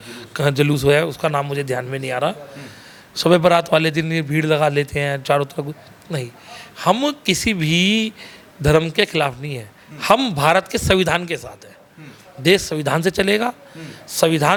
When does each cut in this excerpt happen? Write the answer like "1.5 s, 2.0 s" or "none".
none